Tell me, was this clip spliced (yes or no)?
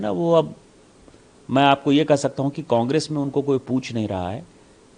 no